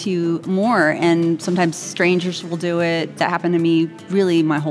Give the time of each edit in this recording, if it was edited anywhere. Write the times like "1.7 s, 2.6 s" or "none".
3.2 s